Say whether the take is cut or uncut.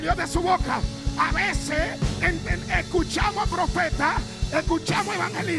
uncut